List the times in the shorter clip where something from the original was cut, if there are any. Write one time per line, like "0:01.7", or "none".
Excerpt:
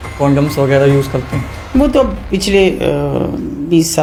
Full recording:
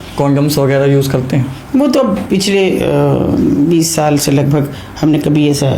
none